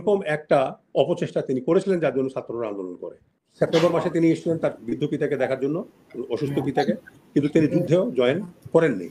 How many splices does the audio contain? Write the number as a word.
one